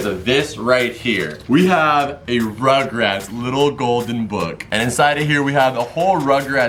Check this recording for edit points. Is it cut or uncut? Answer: cut